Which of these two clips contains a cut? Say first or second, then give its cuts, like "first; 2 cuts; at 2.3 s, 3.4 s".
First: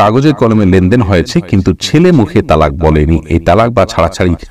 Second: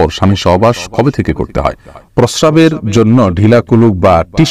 second; 1 cut; at 2.1 s